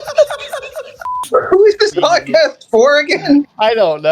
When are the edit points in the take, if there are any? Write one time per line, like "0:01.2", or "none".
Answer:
0:01.2